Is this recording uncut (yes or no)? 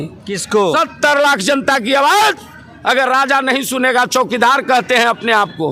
yes